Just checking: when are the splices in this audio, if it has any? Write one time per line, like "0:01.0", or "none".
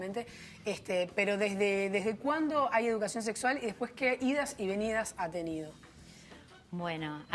0:02.1